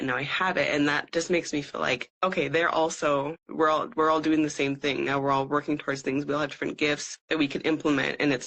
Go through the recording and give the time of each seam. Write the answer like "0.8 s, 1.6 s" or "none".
2.1 s, 3.4 s, 7.1 s